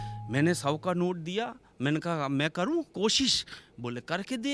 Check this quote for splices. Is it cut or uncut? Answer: uncut